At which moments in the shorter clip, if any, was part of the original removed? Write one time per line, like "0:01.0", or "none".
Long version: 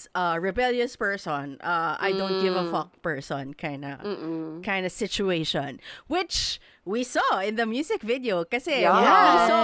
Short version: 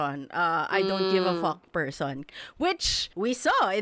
0:02.6